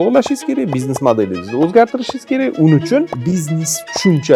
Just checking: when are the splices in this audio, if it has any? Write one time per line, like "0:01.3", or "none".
0:03.2